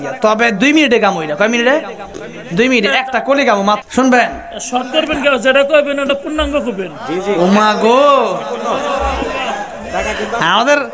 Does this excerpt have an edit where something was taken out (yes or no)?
yes